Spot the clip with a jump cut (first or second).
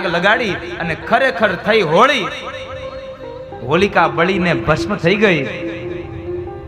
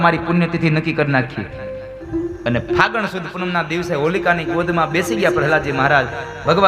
second